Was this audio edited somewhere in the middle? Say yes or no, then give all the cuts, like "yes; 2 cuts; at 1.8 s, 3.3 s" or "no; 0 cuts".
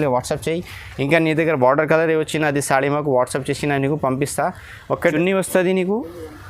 yes; 1 cut; at 5.1 s